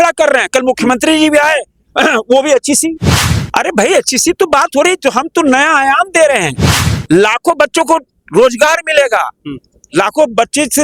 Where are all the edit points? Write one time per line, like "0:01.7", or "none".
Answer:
none